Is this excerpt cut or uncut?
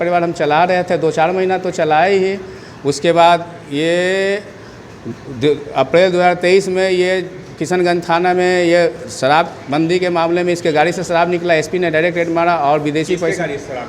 uncut